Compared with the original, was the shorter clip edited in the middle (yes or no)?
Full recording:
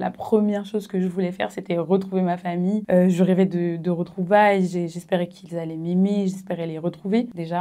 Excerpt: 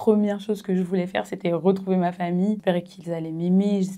yes